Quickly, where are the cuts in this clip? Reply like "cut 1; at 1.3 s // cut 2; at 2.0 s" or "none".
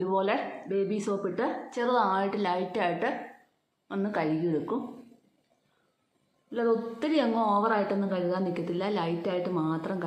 none